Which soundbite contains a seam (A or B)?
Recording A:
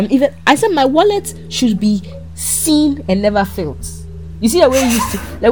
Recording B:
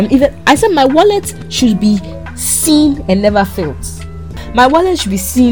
B